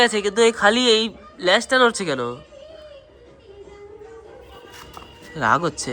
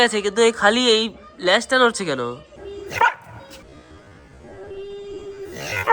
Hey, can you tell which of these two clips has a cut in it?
second; 1 cut; at 2.5 s

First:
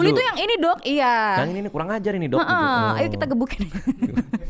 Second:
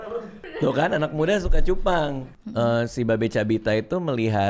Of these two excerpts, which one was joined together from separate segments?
second; 1 cut; at 2.3 s

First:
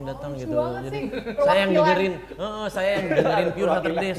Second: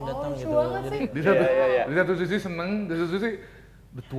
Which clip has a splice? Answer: second; 1 cut; at 1.0 s

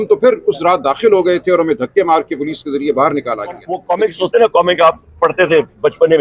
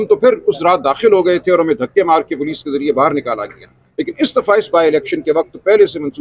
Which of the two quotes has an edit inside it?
first; 1 cut; at 3.7 s

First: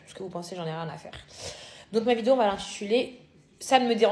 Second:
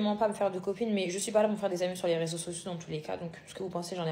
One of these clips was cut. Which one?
first; 1 cut; at 1.7 s

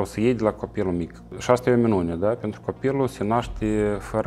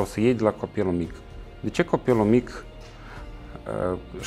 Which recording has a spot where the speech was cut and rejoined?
first; 1 cut; at 1.3 s

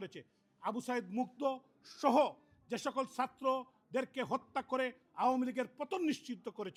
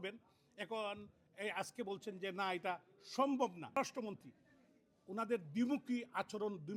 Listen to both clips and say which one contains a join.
second; 1 cut; at 3.8 s

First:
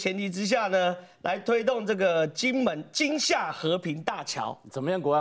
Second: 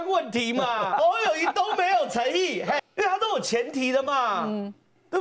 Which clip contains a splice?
second; 2 cuts; at 0.9 s, 2.8 s

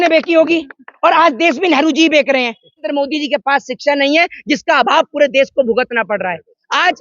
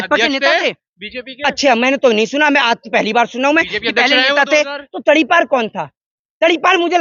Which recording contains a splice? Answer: first; 1 cut; at 2.9 s

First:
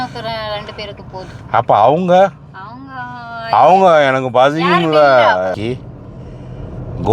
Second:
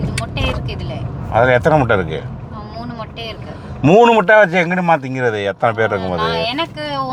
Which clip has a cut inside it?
first; 1 cut; at 5.5 s

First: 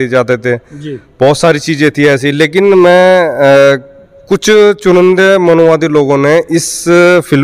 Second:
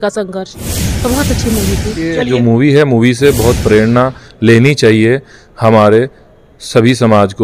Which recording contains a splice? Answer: second; 1 cut; at 2.3 s

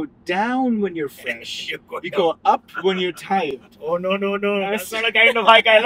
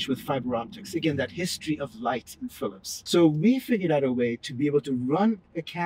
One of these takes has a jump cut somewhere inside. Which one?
second; 1 cut; at 2.9 s

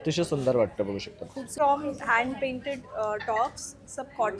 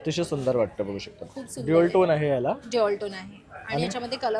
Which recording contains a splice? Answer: first; 1 cut; at 1.5 s

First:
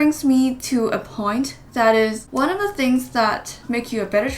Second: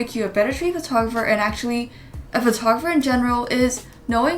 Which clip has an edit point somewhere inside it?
first; 1 cut; at 2.2 s

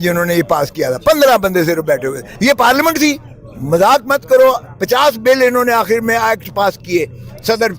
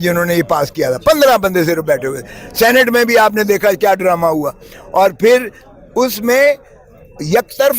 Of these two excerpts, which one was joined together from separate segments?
first; 1 cut; at 2.3 s

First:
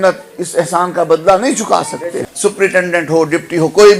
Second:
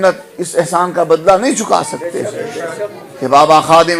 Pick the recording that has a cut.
first; 1 cut; at 2.3 s

